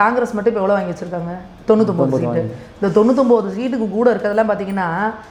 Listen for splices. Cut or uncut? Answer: uncut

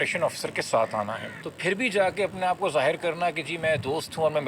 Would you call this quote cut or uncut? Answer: cut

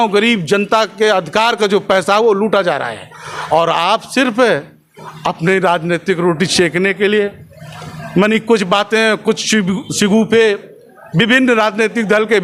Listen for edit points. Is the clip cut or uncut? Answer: uncut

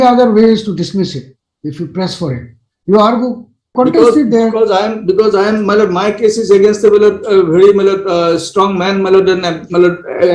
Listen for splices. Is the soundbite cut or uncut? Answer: cut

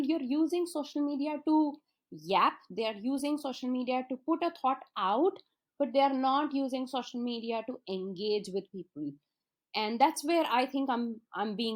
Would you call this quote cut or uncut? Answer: uncut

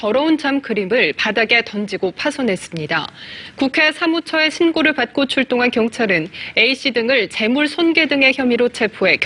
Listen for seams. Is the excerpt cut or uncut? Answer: uncut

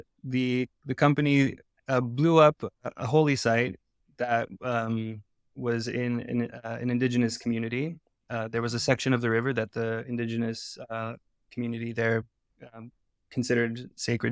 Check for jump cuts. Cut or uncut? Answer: uncut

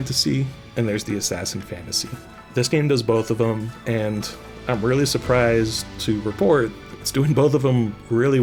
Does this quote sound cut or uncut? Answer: uncut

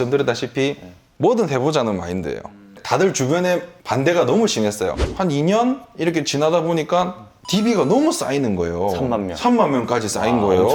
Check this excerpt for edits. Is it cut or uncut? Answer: cut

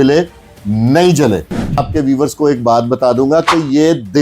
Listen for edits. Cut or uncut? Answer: cut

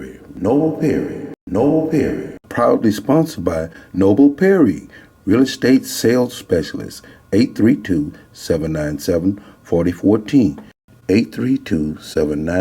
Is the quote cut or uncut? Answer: cut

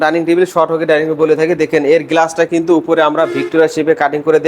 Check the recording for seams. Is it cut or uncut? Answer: uncut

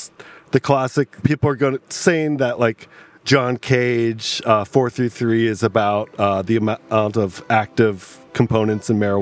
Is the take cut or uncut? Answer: cut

